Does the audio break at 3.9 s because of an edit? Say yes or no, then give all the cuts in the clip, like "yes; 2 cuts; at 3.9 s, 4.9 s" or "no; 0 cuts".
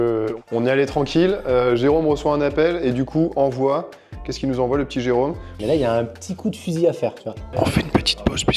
no; 2 cuts; at 5.5 s, 7.4 s